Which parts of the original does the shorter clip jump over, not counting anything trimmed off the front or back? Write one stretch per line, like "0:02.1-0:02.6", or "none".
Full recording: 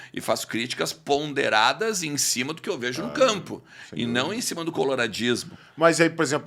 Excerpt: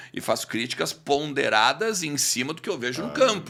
none